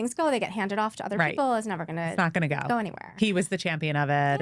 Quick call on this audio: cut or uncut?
uncut